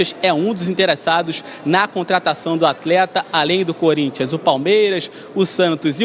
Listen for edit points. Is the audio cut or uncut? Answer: uncut